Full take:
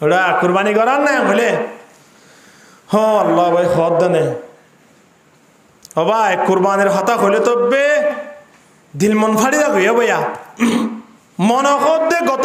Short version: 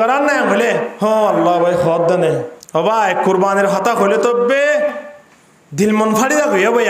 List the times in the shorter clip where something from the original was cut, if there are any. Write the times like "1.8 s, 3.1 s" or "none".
0.9 s, 2.6 s